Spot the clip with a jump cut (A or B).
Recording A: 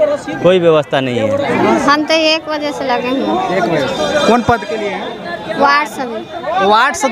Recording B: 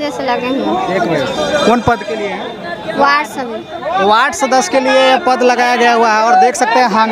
A